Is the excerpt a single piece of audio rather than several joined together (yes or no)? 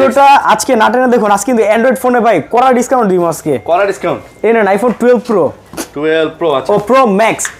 yes